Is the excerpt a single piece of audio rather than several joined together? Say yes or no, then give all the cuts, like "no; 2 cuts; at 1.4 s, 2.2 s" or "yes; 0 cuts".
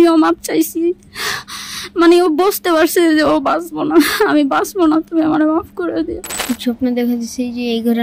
no; 1 cut; at 6.3 s